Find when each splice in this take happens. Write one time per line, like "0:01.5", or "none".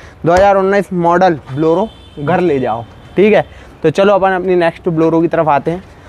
none